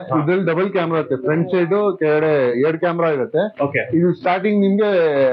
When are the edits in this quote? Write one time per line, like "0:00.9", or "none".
none